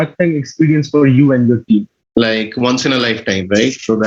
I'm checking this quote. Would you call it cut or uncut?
cut